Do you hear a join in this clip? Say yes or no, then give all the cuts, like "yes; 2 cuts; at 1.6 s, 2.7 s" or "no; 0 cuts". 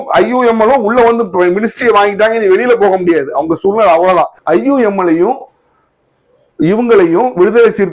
yes; 1 cut; at 4.4 s